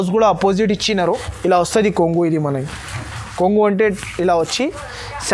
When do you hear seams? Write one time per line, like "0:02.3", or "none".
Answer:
0:01.1